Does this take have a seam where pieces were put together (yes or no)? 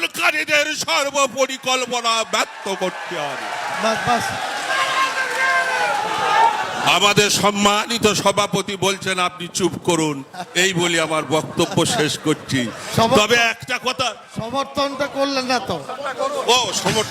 no